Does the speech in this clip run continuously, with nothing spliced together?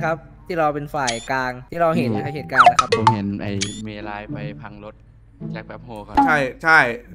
no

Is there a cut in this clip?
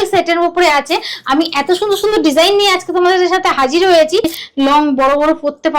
yes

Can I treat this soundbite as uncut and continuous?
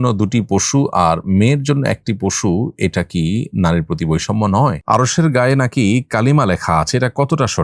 no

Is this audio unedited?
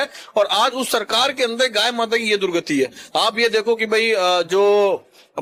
yes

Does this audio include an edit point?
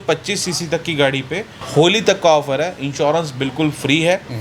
yes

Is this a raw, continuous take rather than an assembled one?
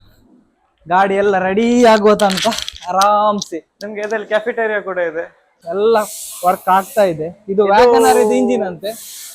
no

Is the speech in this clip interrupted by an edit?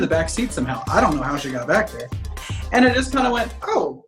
yes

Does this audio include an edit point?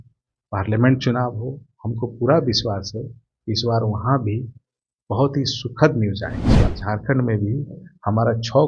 yes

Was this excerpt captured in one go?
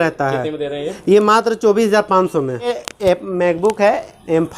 no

